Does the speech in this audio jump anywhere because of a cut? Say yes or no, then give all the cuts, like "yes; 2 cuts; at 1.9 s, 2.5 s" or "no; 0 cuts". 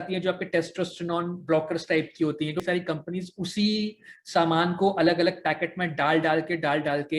yes; 1 cut; at 2.6 s